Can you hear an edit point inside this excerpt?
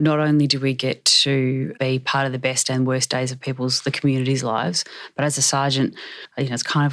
yes; 2 cuts; at 1.7 s, 6.0 s

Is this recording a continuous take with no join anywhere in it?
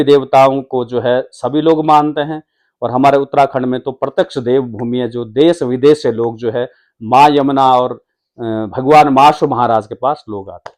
yes; 0 cuts

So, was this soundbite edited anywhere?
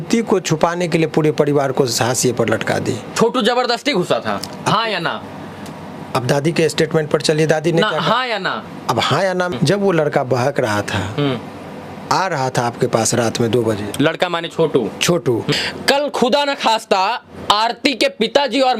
yes; 3 cuts; at 3.1 s, 9.5 s, 15.5 s

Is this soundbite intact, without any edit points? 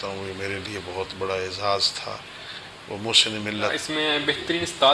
no; 1 cut; at 3.7 s

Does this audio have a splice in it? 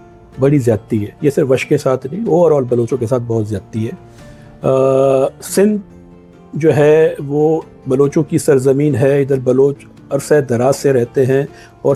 no; 0 cuts

